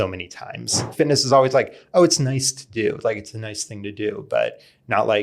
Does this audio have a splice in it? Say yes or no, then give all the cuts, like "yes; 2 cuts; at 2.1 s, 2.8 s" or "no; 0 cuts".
yes; 1 cut; at 0.9 s